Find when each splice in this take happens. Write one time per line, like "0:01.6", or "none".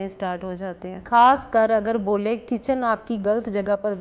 0:01.0